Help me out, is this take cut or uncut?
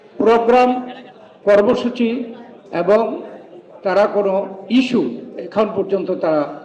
uncut